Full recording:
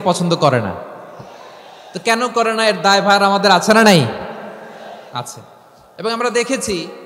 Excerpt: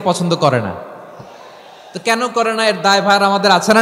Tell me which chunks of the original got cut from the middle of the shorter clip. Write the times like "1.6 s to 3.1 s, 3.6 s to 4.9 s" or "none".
none